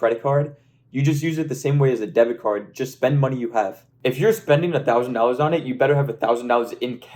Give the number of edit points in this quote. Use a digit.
1